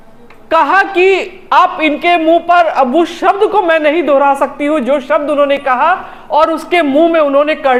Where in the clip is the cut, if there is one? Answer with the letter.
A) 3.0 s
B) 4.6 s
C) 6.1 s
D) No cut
D